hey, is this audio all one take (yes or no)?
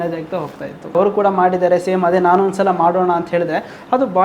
no